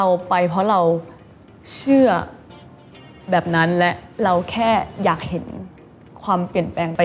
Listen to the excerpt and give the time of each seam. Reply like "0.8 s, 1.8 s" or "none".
none